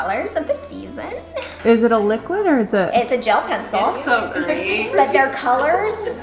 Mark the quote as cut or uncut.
uncut